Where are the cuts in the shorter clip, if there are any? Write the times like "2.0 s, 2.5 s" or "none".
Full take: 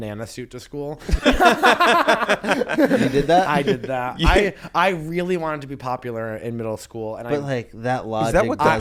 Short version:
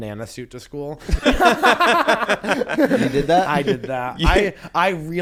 none